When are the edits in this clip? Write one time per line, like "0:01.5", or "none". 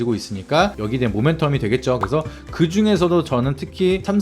0:02.0